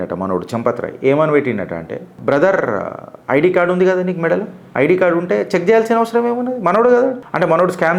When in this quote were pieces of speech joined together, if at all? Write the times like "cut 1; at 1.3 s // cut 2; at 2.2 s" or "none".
none